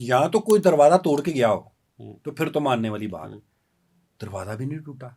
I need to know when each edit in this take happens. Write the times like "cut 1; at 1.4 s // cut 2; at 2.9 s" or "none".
none